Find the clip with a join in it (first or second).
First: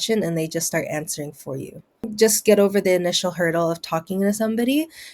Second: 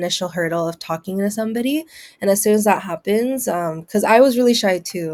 first